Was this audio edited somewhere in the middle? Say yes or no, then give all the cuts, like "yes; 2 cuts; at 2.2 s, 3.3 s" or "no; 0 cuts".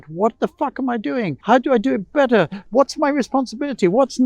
yes; 2 cuts; at 1.4 s, 2.6 s